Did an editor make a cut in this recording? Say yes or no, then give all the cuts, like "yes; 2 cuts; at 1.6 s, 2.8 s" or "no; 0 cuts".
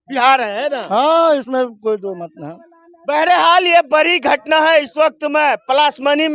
no; 0 cuts